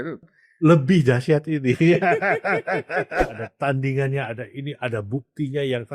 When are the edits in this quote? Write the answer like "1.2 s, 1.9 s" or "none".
3.3 s